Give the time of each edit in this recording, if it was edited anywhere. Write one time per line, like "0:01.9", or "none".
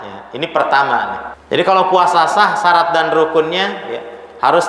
0:01.3